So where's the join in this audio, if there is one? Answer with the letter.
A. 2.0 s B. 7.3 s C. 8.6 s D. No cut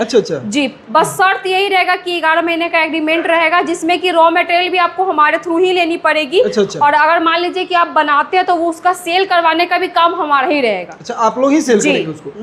D